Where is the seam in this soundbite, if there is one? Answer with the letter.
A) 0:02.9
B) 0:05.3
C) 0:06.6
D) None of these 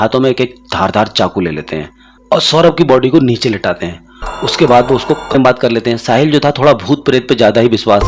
B